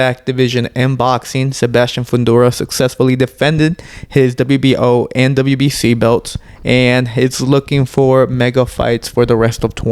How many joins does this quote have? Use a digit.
0